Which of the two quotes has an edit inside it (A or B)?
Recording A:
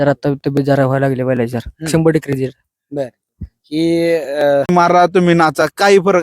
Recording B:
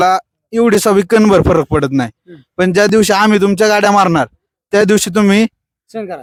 A